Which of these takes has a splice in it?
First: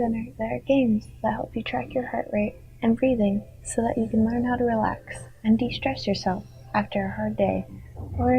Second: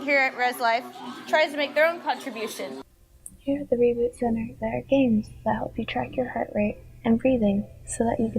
second; 1 cut; at 2.9 s

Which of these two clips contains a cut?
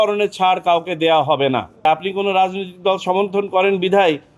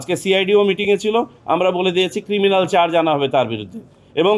first; 1 cut; at 1.9 s

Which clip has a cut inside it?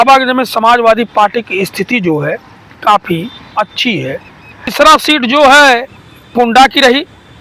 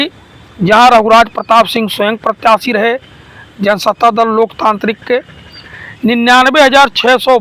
first; 1 cut; at 4.7 s

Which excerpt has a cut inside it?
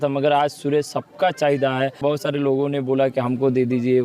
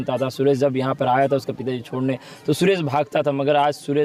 first; 1 cut; at 2.0 s

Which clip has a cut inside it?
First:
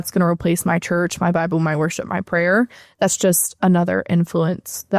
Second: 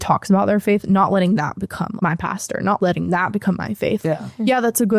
second; 3 cuts; at 1.9 s, 2.8 s, 4.0 s

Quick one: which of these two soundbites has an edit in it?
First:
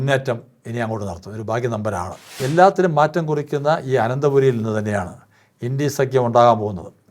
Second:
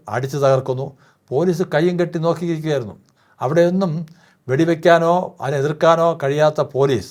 first; 1 cut; at 2.4 s

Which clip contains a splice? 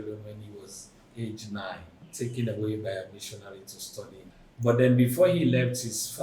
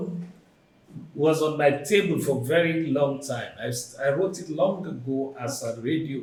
first; 2 cuts; at 2.0 s, 4.4 s

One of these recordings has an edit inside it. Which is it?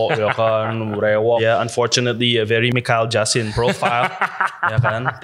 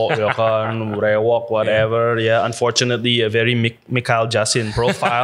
first; 2 cuts; at 1.4 s, 2.7 s

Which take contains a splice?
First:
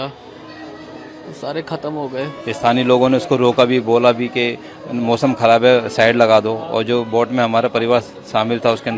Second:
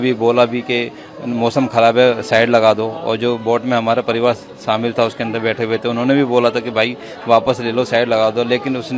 first; 1 cut; at 2.4 s

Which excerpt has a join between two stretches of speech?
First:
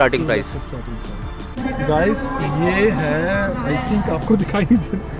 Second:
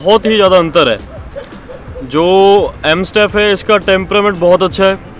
first; 1 cut; at 1.6 s

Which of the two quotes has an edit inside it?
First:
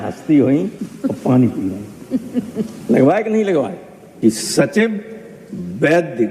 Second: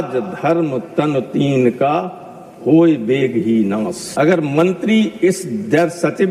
first; 1 cut; at 4.1 s

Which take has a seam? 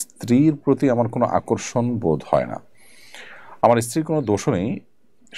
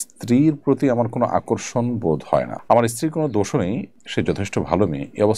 second; 2 cuts; at 2.6 s, 4.0 s

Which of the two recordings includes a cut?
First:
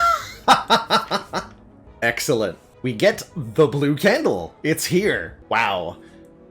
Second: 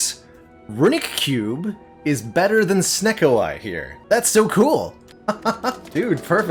first; 2 cuts; at 2.7 s, 5.3 s

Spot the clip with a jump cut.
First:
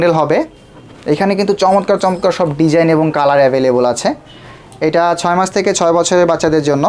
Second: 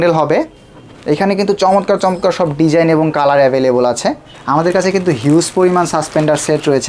second; 1 cut; at 4.3 s

